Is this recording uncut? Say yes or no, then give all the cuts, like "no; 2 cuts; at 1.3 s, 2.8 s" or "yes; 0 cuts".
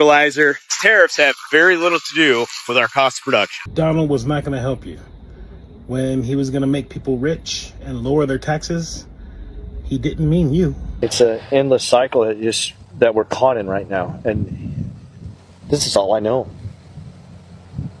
no; 2 cuts; at 3.6 s, 10.8 s